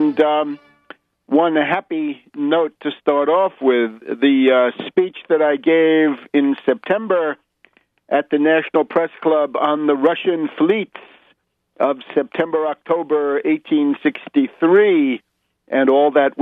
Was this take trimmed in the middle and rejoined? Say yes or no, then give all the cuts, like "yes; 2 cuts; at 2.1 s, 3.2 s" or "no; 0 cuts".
no; 0 cuts